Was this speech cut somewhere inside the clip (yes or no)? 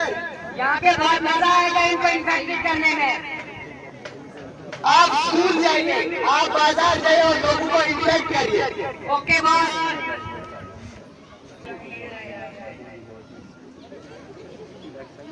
yes